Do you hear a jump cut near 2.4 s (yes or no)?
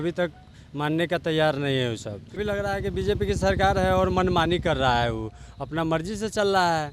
yes